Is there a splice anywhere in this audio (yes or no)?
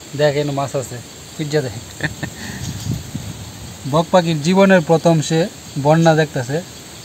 no